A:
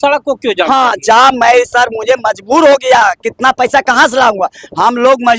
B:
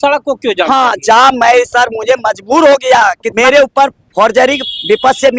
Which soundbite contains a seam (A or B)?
B